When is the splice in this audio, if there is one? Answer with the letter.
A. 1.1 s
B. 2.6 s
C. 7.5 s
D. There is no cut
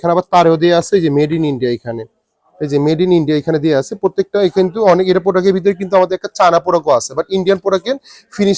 D